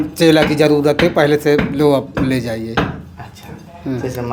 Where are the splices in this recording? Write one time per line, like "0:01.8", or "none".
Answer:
none